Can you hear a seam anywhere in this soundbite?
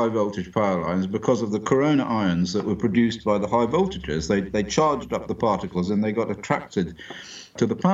no; 0 cuts

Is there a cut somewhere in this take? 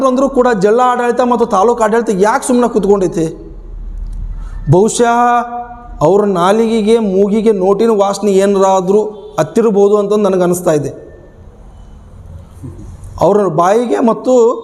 no; 0 cuts

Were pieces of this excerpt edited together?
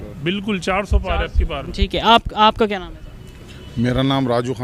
no; 0 cuts

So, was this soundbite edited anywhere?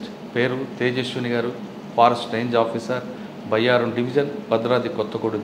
no; 0 cuts

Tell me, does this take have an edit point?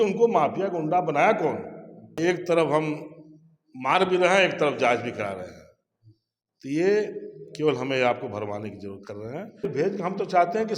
yes; 2 cuts; at 2.2 s, 9.6 s

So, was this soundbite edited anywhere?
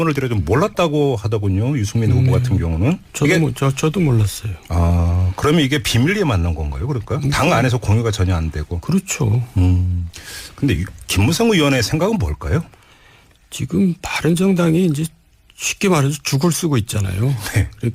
no; 0 cuts

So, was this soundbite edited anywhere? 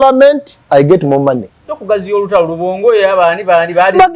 yes; 1 cut; at 1.7 s

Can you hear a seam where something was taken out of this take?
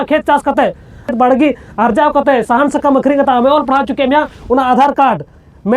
yes; 1 cut; at 1.1 s

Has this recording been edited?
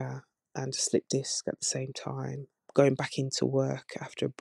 no; 0 cuts

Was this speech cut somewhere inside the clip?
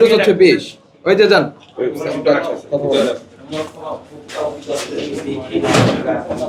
no; 0 cuts

